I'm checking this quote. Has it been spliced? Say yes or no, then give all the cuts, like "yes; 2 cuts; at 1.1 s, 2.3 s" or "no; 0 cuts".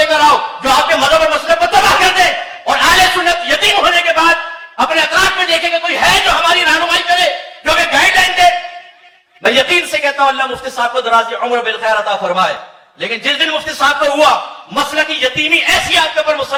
no; 0 cuts